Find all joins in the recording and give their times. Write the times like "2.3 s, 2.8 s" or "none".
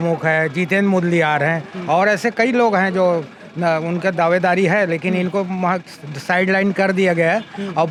none